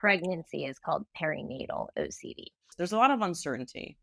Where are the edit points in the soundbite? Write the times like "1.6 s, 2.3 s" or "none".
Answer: 2.7 s